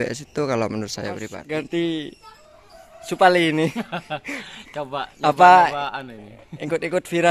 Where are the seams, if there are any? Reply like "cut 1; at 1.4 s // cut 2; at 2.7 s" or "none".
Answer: cut 1; at 1.3 s